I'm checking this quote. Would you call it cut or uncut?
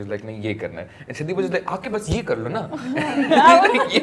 uncut